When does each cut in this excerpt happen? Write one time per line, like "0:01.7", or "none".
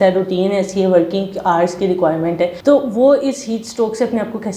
0:02.6